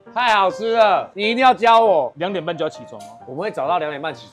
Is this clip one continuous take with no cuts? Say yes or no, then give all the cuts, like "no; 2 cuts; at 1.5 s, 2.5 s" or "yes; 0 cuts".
no; 2 cuts; at 1.1 s, 2.1 s